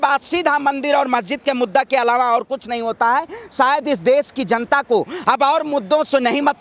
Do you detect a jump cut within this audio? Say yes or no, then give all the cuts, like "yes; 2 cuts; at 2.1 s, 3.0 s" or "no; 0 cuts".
no; 0 cuts